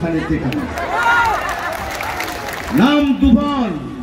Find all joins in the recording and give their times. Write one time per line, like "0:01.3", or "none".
0:01.8